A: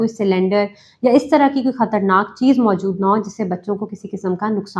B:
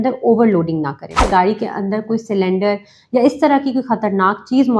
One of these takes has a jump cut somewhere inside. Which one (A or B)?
B